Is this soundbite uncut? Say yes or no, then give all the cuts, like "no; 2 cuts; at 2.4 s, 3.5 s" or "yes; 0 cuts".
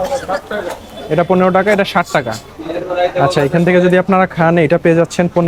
yes; 0 cuts